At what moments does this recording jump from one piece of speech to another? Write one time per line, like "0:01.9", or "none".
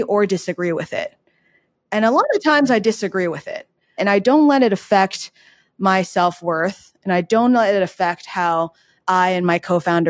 0:04.0

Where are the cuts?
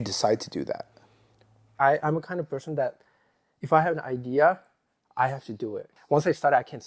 0:01.8
0:05.9

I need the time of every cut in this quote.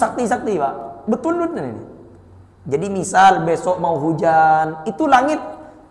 none

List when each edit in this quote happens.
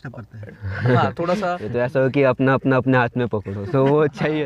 0:01.7

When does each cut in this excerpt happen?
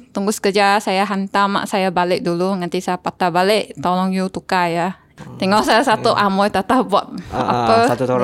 0:05.0

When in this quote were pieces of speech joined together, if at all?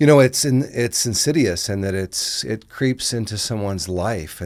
none

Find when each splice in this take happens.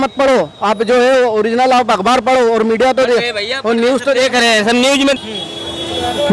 0:05.2

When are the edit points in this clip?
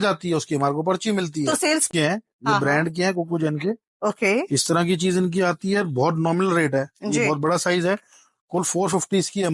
0:01.9

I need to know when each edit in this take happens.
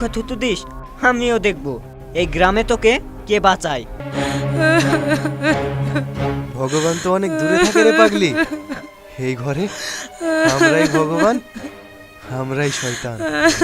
0:04.0

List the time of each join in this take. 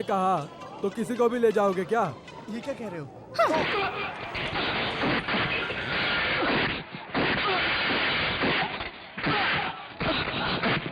none

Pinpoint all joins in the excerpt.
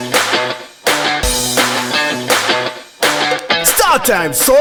none

